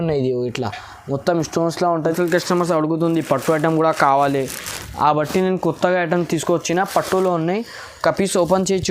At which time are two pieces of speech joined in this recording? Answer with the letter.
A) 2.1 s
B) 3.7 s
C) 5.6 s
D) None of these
A